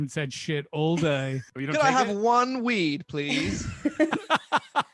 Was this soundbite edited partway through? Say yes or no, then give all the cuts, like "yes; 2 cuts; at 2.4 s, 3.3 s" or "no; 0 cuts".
yes; 1 cut; at 1.5 s